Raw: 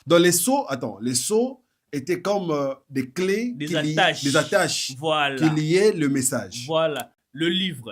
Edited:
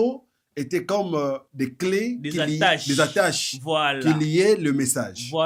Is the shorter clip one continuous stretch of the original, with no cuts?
yes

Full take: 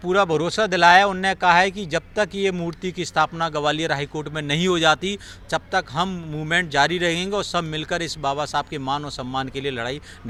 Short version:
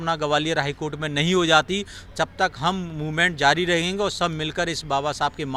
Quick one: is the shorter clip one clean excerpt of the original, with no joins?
yes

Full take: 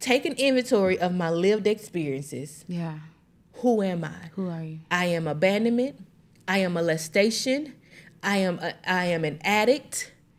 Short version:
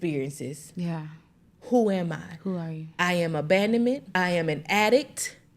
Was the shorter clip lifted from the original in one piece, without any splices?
no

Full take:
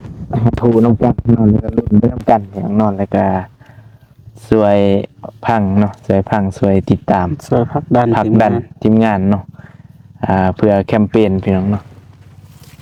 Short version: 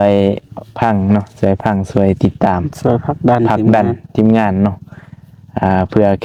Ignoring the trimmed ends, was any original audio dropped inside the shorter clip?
no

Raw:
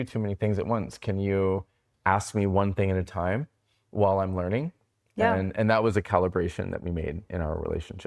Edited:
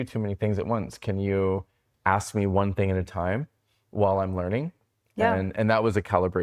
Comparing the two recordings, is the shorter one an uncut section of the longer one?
yes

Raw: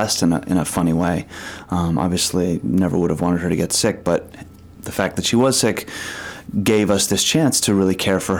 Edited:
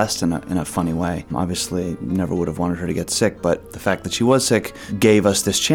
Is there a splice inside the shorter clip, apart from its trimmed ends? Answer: yes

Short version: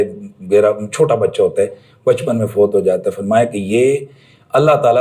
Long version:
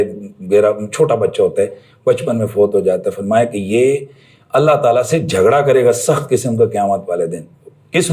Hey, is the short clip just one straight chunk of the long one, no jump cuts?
yes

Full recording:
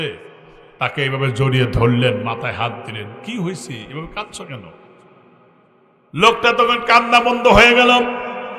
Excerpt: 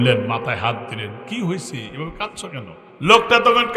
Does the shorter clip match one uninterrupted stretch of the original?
no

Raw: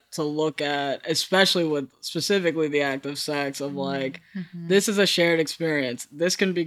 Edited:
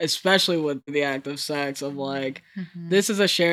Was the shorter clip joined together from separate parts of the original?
yes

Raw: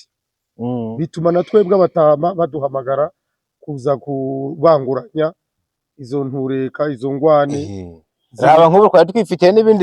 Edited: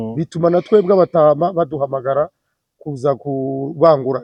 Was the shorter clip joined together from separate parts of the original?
no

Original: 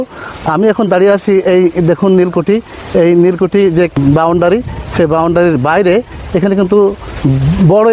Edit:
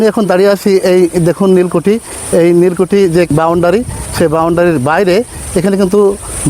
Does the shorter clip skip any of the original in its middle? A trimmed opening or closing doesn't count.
yes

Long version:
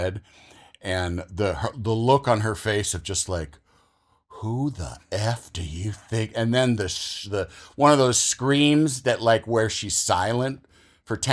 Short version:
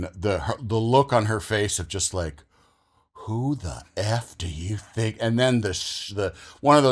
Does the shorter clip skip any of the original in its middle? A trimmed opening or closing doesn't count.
no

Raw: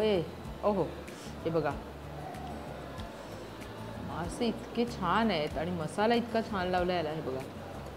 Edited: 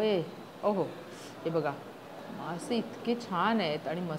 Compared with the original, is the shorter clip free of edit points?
no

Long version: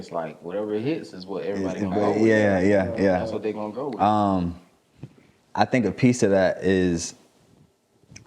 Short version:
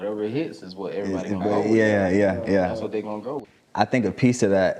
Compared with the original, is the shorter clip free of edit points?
no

